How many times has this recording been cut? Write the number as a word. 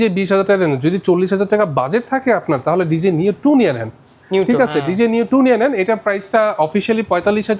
zero